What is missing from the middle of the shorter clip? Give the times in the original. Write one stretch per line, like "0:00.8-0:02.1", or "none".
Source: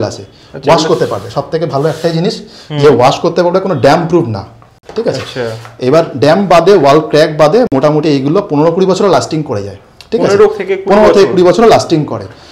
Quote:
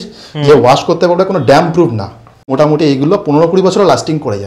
0:04.8-0:07.7